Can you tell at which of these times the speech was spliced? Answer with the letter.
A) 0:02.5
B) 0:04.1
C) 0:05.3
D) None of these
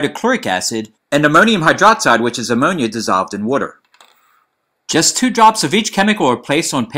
C